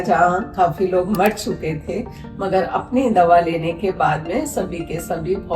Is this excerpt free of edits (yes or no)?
yes